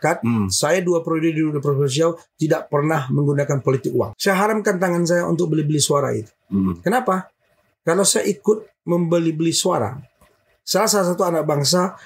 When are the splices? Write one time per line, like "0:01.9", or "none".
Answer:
0:04.1